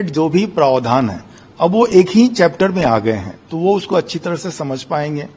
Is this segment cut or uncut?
uncut